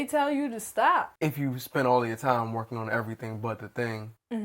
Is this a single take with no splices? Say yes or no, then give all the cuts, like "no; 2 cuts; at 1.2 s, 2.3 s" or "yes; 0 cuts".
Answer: no; 1 cut; at 1.1 s